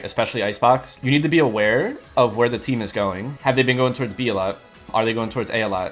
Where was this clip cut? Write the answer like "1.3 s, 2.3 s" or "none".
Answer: 1.0 s, 3.3 s, 4.9 s